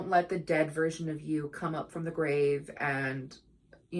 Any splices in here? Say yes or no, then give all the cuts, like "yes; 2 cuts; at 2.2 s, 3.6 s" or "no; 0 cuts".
no; 0 cuts